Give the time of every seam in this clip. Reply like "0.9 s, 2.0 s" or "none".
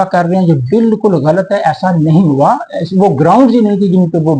none